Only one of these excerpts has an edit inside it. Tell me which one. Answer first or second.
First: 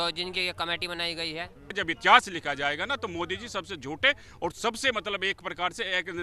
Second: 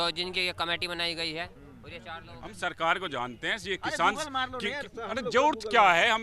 first